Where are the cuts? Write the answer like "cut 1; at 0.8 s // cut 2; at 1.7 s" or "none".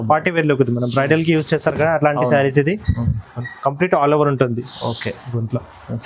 none